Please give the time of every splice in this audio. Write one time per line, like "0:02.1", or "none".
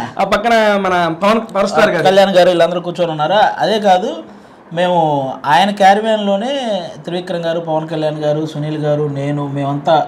none